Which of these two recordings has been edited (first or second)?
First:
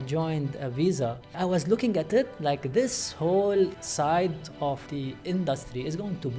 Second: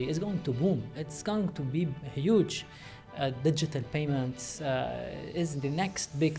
first